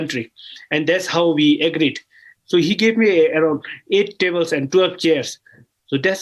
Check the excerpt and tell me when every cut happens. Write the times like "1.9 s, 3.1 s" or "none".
none